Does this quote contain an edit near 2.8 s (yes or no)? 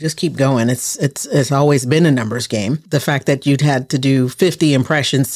yes